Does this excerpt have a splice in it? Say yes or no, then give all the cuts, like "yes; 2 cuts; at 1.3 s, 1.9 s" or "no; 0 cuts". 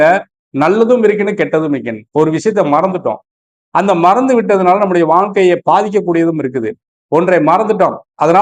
no; 0 cuts